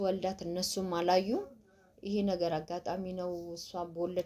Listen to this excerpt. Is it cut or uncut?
uncut